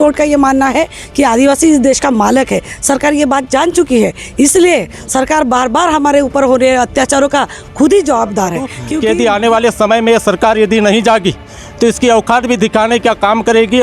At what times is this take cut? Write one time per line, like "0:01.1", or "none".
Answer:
0:08.8